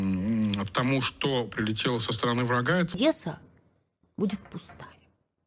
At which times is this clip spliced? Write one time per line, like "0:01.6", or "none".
0:02.9